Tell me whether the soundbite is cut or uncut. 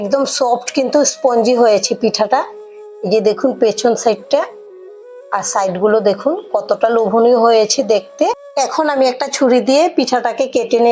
cut